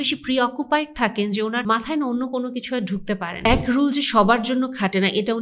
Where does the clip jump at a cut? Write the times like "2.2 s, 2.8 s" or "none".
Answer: 1.8 s, 3.4 s